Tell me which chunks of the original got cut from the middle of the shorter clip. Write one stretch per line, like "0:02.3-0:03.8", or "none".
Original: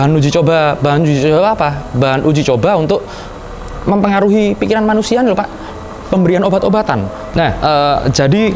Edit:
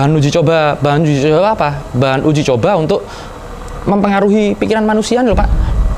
none